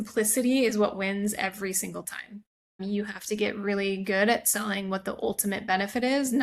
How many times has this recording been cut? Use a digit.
1